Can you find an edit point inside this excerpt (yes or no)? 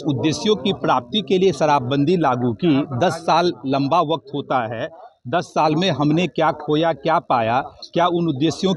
no